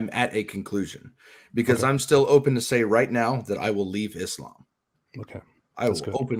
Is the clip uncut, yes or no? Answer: yes